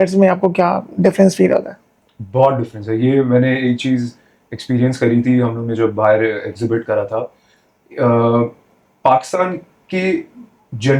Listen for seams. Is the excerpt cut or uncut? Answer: uncut